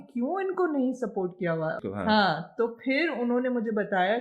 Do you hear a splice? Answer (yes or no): yes